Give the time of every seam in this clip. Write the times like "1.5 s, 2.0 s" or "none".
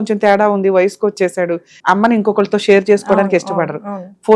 1.7 s